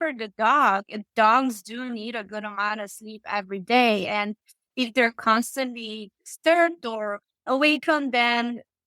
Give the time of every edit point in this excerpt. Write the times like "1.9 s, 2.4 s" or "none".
7.4 s